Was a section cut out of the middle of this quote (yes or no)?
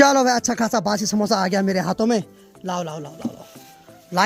no